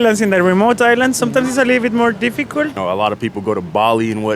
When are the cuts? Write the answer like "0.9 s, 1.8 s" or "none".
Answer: 2.8 s